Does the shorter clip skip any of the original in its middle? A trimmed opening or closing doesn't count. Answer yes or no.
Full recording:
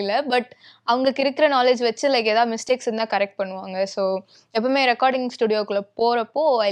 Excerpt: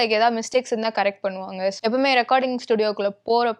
yes